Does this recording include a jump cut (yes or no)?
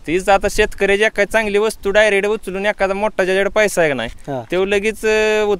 no